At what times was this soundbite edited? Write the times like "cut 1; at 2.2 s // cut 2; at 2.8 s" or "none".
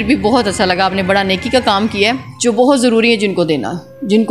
cut 1; at 2.3 s